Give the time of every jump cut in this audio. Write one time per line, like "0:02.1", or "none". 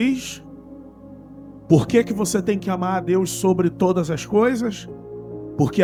none